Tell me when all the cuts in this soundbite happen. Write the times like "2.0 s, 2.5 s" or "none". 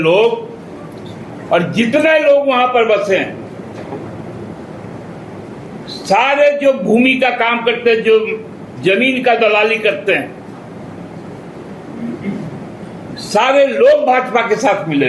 none